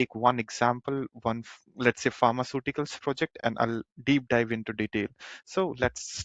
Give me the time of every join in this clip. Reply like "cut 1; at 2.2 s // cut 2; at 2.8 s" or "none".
none